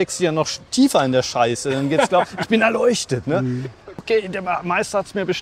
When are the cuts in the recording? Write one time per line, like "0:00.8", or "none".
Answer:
0:04.0

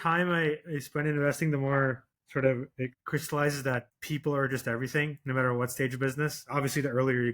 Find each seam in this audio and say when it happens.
0:03.0
0:04.0

